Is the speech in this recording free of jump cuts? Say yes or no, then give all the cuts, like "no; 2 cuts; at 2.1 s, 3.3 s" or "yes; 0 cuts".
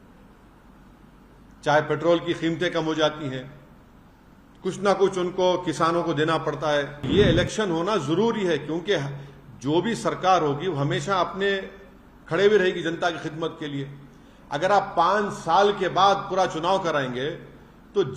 no; 1 cut; at 7.1 s